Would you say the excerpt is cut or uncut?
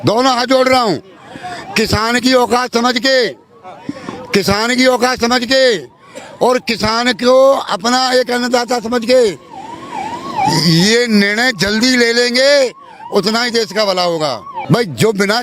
cut